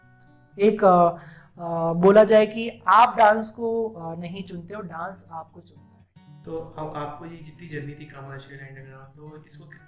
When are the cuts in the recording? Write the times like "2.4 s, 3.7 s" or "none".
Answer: 6.3 s